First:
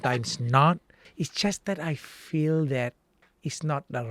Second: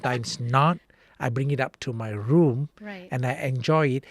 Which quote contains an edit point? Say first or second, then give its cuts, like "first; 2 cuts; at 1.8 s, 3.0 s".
first; 1 cut; at 1.0 s